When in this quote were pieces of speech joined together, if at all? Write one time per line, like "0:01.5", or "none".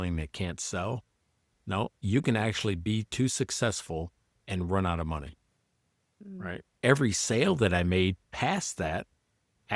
0:06.8